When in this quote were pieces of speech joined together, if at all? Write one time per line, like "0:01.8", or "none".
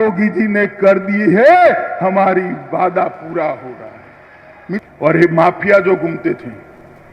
0:04.8